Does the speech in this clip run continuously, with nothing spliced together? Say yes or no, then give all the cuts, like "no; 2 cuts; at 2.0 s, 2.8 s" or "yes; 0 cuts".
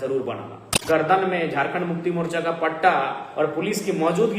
no; 1 cut; at 1.0 s